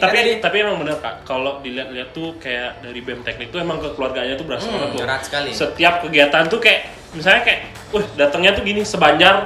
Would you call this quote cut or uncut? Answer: uncut